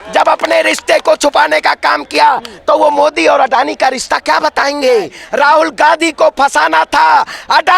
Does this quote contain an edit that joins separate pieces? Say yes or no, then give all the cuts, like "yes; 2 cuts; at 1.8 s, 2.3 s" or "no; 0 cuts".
yes; 1 cut; at 5.2 s